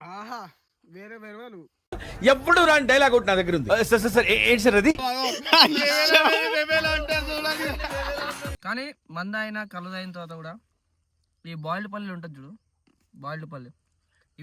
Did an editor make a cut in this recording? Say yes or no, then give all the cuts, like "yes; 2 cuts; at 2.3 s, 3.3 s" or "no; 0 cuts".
yes; 1 cut; at 8.6 s